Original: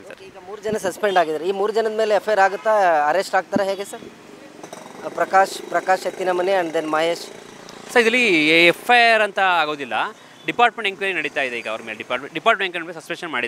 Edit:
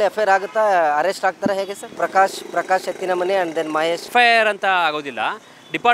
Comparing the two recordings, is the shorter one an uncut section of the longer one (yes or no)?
no